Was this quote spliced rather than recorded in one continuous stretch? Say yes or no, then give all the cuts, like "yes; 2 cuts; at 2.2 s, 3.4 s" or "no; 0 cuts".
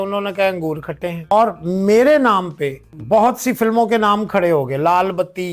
yes; 2 cuts; at 1.2 s, 2.9 s